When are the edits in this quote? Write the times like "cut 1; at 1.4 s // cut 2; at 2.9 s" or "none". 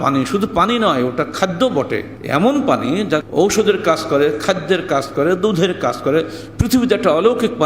cut 1; at 2.1 s // cut 2; at 3.3 s